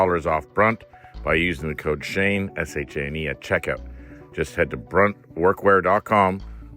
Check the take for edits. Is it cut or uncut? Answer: uncut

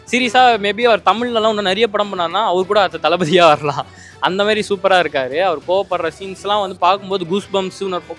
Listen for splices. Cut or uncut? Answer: uncut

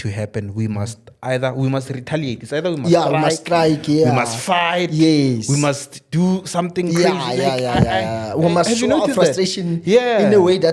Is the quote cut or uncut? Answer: uncut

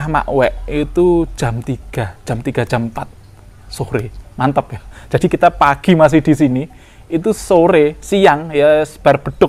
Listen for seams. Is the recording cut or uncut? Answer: uncut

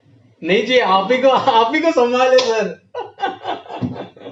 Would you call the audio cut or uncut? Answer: uncut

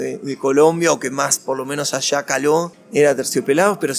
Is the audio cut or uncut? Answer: cut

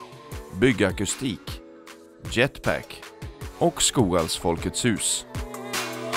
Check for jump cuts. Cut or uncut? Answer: cut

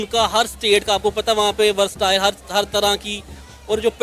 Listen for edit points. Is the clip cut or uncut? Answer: uncut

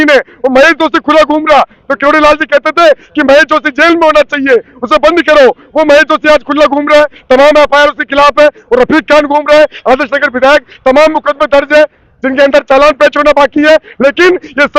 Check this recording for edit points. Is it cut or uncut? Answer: uncut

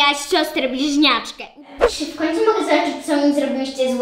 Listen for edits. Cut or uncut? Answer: cut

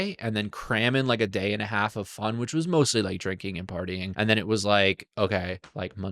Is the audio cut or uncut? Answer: cut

